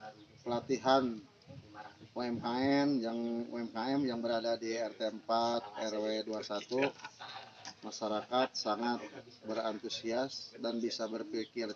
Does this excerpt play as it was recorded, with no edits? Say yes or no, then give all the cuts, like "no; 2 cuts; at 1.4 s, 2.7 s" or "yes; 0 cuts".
yes; 0 cuts